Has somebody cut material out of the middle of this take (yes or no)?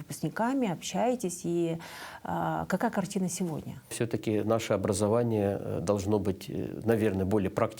yes